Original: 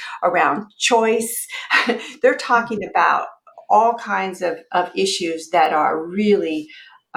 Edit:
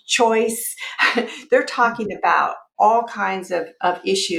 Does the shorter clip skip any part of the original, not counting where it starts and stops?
yes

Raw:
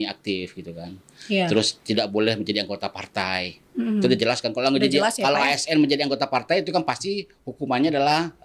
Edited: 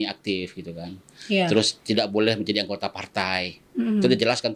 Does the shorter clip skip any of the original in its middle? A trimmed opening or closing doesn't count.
no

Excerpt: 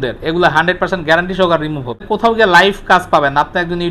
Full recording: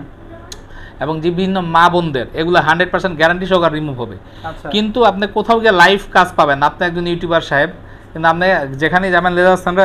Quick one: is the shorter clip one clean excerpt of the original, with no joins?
no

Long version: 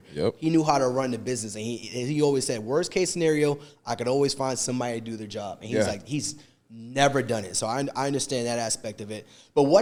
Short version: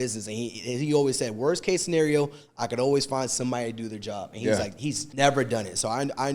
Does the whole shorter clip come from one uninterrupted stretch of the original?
no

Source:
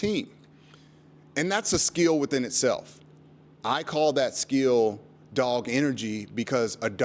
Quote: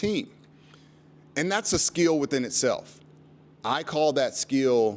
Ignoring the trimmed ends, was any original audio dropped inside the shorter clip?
no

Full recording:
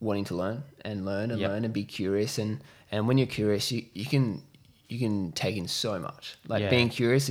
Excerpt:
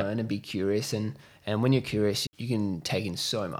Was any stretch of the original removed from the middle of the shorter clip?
yes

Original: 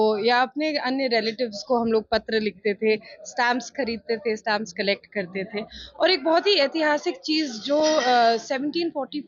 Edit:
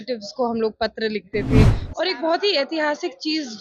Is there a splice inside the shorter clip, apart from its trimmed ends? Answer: yes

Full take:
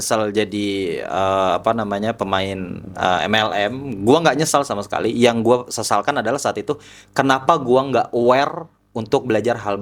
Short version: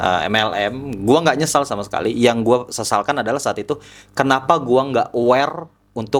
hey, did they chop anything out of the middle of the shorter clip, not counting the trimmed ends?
no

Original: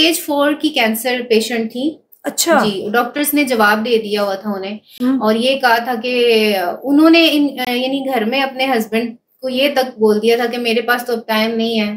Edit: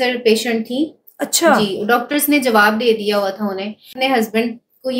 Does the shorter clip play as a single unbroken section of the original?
no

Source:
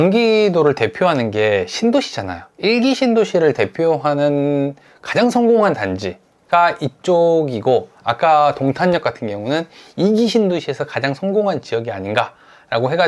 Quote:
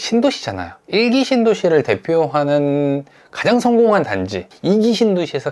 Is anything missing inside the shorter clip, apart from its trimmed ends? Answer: yes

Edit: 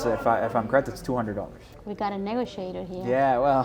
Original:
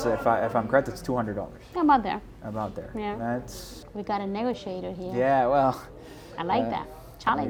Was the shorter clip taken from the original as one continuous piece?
no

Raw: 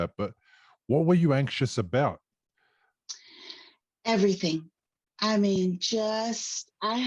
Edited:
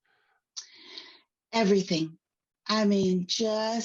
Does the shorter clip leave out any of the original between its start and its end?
no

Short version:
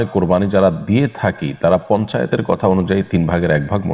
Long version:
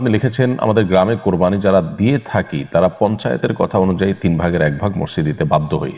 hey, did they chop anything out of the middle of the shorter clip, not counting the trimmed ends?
no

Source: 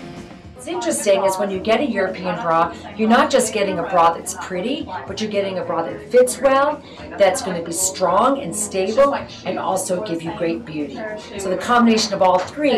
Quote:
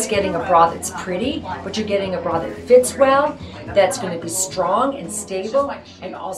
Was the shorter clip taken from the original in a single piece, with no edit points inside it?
yes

